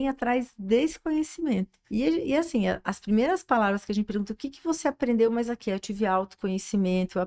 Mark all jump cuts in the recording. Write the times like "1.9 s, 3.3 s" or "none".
1.8 s